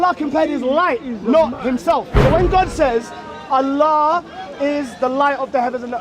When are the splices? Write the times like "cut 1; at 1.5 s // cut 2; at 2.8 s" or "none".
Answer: cut 1; at 2.1 s